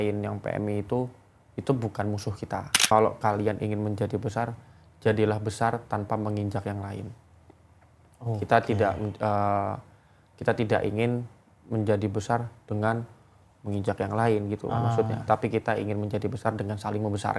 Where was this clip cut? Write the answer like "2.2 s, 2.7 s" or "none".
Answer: 2.8 s, 15.2 s